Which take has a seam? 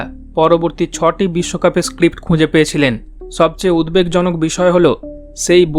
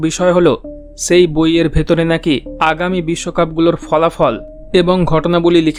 first; 1 cut; at 3.2 s

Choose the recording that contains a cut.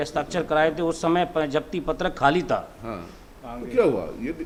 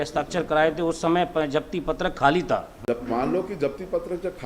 second; 1 cut; at 2.7 s

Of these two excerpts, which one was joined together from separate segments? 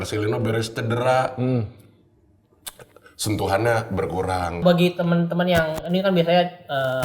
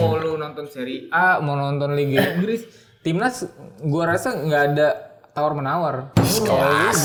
first; 1 cut; at 4.6 s

